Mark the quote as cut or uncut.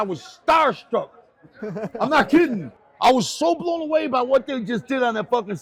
uncut